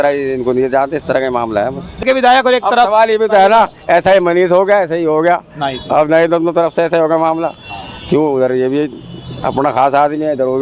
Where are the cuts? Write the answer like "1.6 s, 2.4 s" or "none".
2.0 s